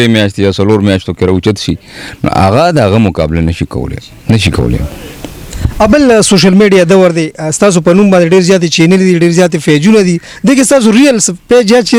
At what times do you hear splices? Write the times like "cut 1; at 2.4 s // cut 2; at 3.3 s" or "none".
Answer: none